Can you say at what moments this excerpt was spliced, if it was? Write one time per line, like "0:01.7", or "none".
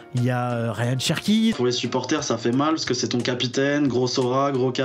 0:01.5